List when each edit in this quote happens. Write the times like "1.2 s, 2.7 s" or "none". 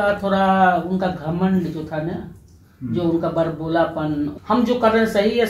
4.3 s